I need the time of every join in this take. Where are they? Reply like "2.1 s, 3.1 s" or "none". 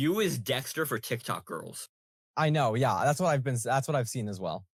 none